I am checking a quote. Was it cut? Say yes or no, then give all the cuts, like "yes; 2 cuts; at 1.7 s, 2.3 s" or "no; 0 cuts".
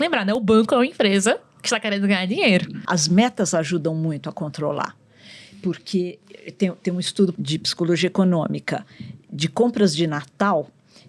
yes; 2 cuts; at 2.8 s, 7.3 s